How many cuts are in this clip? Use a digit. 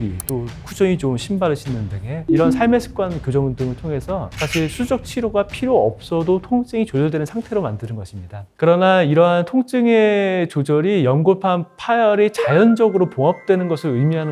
0